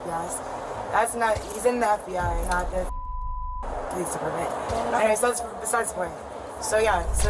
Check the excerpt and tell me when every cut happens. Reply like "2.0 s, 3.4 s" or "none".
none